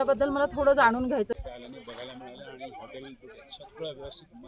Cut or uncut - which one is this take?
cut